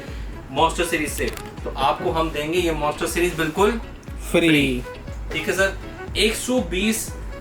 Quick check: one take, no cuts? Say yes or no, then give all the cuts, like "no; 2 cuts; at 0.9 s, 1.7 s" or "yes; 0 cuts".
yes; 0 cuts